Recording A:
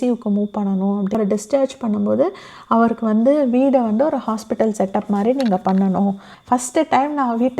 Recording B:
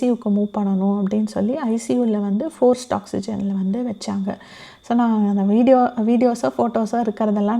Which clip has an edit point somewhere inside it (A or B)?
A